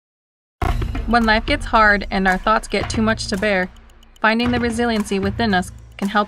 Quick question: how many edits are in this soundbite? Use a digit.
1